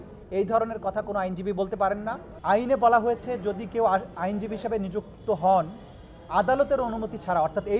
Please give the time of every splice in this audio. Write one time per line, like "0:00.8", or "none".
0:02.3